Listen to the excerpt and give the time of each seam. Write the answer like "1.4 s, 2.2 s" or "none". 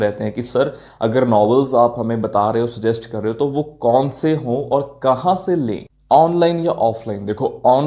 none

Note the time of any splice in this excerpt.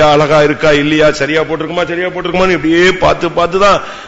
none

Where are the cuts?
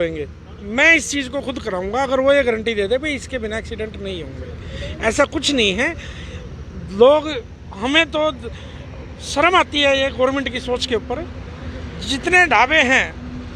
none

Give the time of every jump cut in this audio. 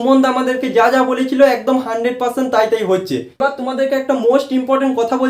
3.3 s

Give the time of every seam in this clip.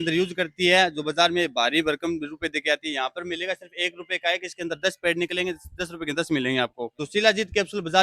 6.9 s

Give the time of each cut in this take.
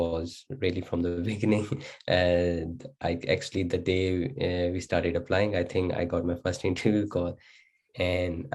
none

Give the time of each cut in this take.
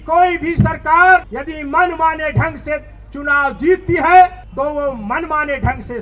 1.3 s, 4.4 s

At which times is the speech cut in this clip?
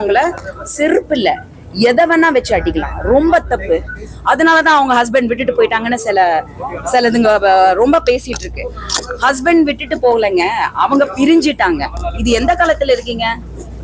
none

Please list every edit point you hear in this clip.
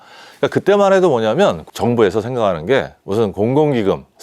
1.7 s

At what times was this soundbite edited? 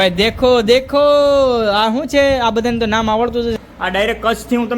3.5 s

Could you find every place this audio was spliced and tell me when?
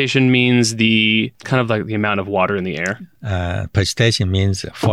1.4 s

